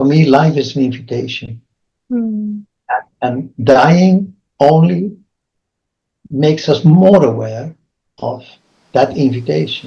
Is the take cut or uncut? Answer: uncut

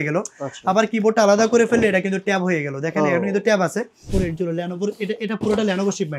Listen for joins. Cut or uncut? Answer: cut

